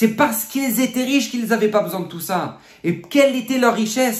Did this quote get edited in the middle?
no; 0 cuts

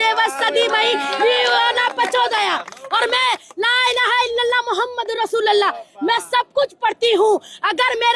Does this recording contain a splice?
no; 0 cuts

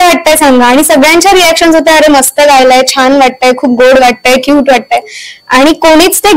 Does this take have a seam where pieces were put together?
no; 0 cuts

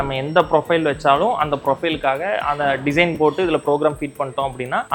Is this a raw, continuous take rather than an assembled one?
yes; 0 cuts

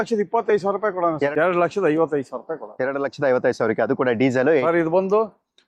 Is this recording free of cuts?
no; 2 cuts; at 1.3 s, 4.6 s

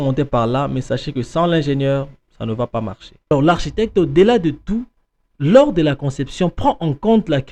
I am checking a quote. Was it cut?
yes; 1 cut; at 3.3 s

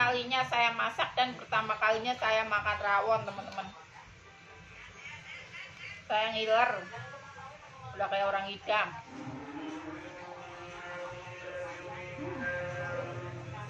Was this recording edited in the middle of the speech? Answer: no; 0 cuts

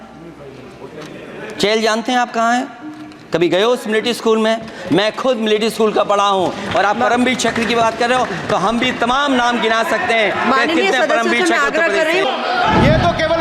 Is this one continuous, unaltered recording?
no; 1 cut; at 12.2 s

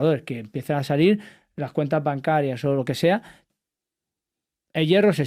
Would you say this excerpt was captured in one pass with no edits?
no; 1 cut; at 3.4 s

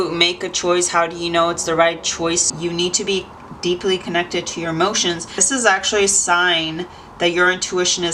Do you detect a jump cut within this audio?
yes; 2 cuts; at 2.5 s, 5.3 s

